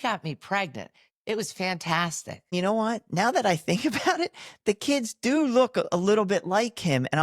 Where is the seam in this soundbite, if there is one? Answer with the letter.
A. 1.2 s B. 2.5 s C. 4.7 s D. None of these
B